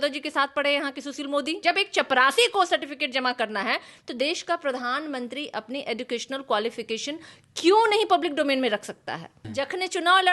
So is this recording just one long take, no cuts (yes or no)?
no